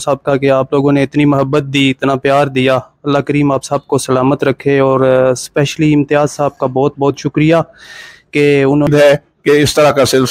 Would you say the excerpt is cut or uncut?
cut